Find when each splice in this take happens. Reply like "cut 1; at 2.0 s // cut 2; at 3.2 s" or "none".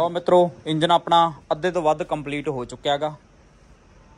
none